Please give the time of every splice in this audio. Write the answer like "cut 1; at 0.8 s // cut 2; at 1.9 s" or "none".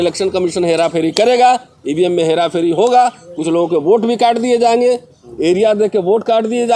none